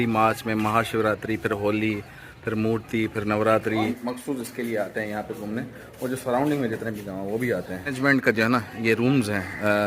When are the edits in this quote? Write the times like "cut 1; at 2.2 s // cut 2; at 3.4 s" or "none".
cut 1; at 3.9 s // cut 2; at 7.9 s